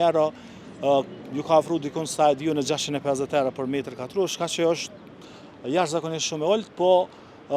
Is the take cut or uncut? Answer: uncut